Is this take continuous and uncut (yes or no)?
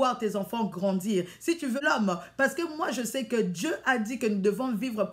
yes